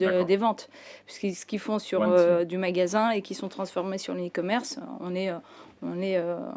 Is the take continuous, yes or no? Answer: yes